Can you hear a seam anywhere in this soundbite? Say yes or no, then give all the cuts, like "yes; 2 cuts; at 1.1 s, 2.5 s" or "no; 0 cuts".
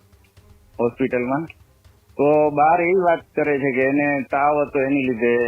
no; 0 cuts